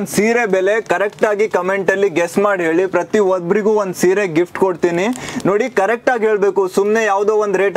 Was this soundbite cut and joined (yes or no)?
no